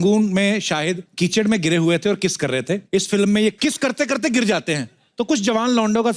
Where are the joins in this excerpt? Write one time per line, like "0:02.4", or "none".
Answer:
0:01.0
0:02.8
0:03.6